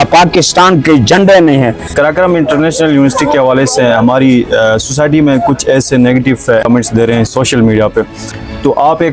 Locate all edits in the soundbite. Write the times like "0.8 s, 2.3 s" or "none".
1.9 s, 6.6 s

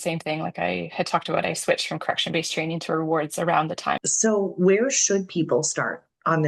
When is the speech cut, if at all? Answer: 4.0 s

